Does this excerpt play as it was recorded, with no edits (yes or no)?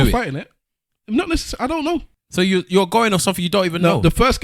no